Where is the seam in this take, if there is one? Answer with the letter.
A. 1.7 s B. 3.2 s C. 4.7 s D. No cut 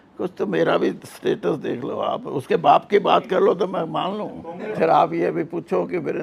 C